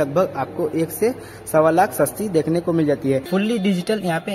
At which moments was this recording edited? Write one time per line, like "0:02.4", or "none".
0:03.2